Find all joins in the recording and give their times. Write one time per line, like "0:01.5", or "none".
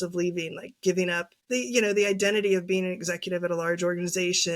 0:01.3